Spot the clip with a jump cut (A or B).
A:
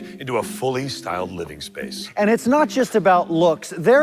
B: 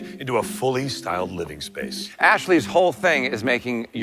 A